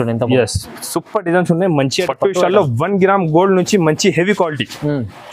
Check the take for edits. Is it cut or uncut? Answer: cut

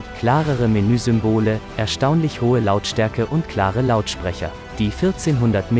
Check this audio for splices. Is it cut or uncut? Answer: cut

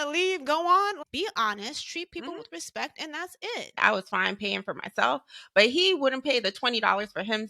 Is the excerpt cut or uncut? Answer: cut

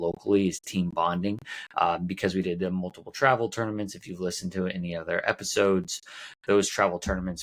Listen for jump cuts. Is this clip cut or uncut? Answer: uncut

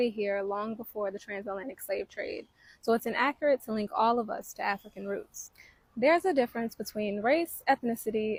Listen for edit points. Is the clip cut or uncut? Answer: uncut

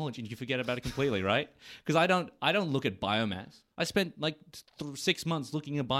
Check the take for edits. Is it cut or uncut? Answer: uncut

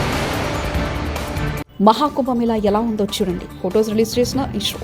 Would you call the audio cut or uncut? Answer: uncut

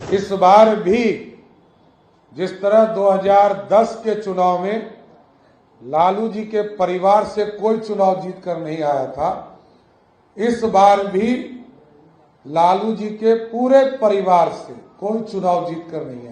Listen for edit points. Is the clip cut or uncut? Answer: uncut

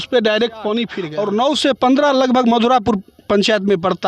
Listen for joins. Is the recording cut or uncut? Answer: cut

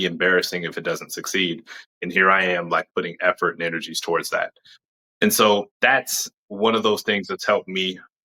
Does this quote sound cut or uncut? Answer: uncut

